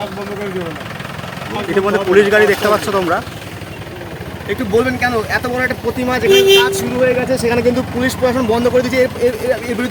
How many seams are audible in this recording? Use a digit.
0